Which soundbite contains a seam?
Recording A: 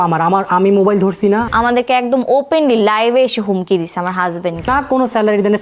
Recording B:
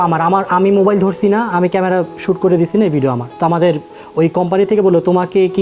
A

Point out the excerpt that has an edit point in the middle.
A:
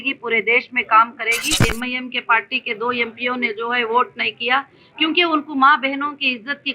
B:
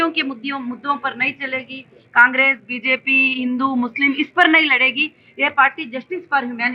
A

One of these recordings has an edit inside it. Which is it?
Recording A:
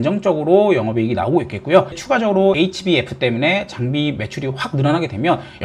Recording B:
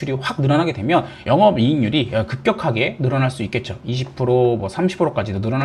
A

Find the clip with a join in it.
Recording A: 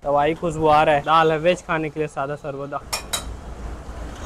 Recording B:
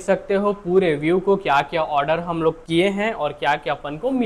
A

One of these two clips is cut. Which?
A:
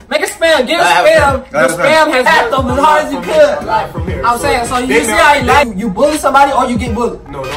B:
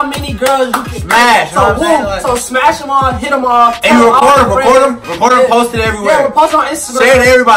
A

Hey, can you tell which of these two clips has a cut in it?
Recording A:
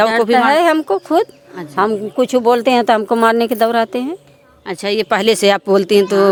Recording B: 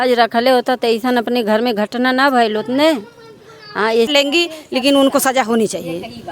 B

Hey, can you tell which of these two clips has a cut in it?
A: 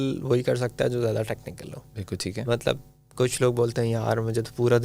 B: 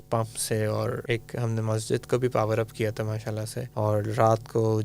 B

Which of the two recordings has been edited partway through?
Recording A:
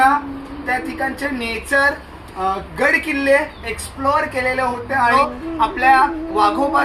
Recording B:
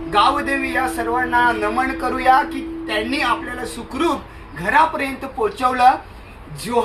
A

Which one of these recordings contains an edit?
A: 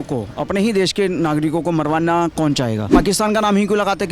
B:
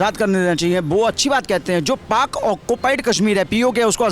A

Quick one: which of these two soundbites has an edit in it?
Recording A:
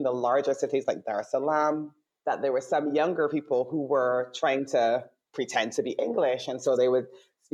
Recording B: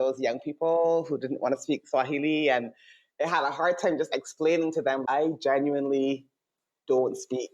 B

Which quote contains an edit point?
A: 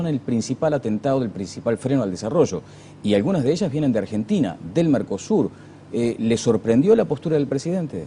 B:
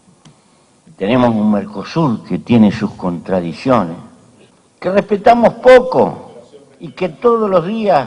A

